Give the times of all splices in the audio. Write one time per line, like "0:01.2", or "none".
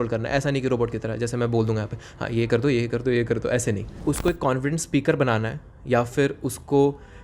0:03.9